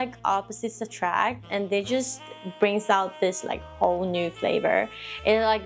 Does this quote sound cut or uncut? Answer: uncut